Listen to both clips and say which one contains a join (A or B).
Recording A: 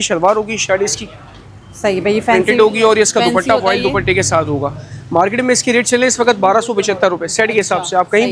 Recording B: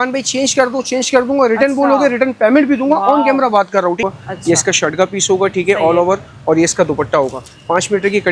B